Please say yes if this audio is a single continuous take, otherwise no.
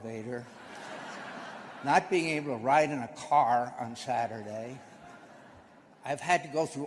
yes